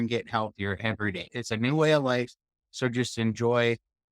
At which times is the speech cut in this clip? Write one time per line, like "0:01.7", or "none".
0:01.3